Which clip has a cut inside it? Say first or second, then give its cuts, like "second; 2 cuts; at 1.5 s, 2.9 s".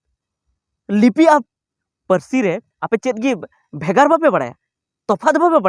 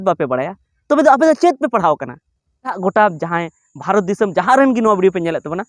second; 1 cut; at 2.8 s